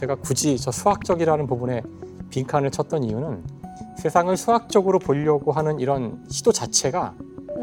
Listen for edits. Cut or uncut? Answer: uncut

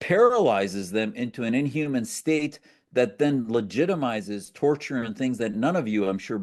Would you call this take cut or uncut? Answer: uncut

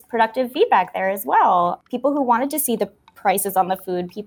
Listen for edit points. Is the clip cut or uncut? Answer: cut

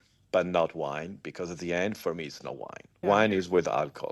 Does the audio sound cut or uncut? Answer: uncut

